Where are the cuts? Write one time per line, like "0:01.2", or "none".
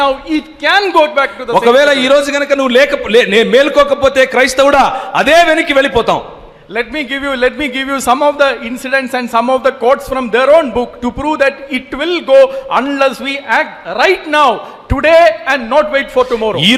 none